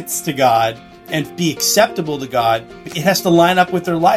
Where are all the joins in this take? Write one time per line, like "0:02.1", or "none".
0:01.2
0:02.8